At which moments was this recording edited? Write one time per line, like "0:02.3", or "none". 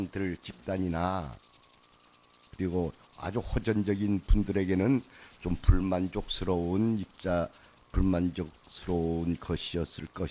none